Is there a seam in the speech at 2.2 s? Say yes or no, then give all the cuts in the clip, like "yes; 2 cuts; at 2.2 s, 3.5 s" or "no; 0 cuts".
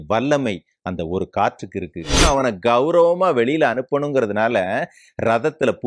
yes; 1 cut; at 2.2 s